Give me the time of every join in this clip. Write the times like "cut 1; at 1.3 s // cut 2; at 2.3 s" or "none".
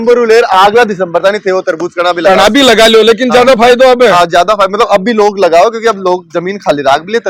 none